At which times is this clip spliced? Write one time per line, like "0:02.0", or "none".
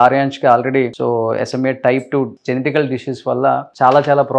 0:00.9
0:02.4